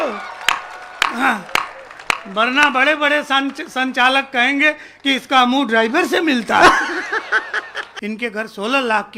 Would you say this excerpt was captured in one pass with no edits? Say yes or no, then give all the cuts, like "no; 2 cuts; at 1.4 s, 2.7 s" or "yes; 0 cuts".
no; 1 cut; at 7.9 s